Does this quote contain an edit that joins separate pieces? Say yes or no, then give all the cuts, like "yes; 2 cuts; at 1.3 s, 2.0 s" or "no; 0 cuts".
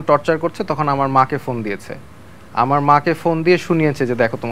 no; 0 cuts